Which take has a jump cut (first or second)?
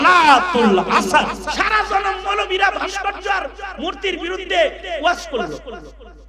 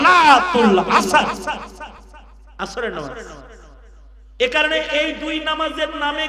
first